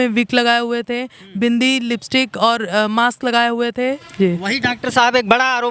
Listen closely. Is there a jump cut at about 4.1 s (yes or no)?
yes